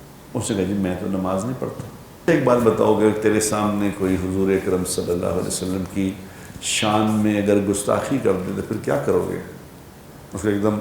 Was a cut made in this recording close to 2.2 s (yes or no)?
yes